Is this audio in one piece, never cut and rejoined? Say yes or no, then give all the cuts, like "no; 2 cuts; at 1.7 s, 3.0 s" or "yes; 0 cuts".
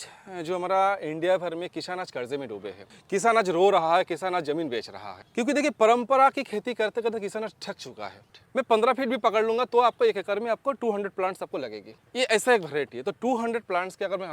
no; 1 cut; at 8.3 s